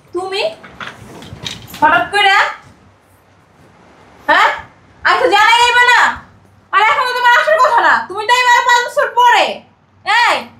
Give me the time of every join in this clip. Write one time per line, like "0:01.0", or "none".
none